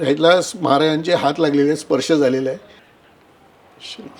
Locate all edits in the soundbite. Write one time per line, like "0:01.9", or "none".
0:02.9